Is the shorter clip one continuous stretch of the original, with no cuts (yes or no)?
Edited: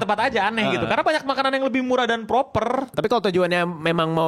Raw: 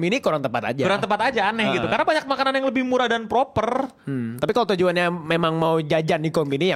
no